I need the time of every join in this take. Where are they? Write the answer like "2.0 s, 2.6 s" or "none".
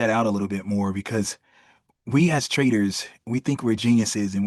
none